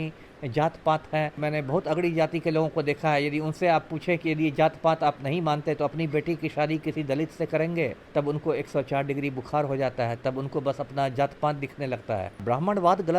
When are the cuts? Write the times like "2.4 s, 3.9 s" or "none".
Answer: 1.4 s, 8.0 s, 12.4 s